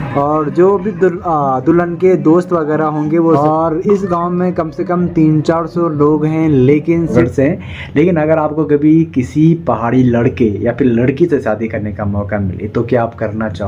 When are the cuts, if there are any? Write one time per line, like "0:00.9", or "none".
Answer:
0:03.4
0:07.1